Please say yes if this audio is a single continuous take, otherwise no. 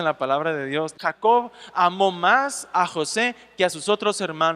no